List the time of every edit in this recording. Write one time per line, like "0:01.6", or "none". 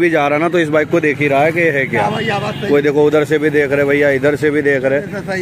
none